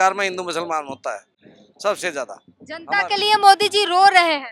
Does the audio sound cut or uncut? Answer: uncut